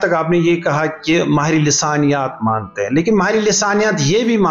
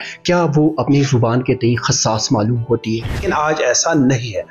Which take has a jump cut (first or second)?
second